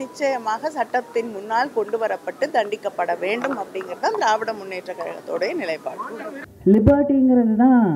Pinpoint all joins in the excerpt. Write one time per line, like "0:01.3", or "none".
0:06.4